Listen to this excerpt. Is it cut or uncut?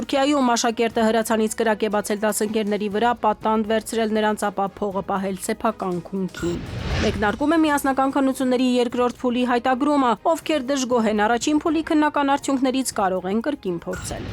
cut